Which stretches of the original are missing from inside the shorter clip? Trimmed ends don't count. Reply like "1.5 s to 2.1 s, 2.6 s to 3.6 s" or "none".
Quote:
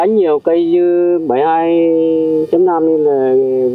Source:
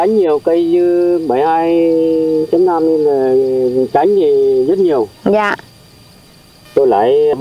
none